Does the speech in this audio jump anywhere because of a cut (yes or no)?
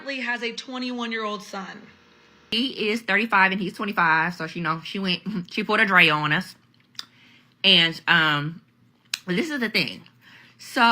yes